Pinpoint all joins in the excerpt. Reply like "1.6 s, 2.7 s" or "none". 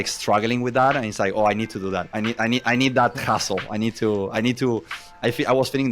2.1 s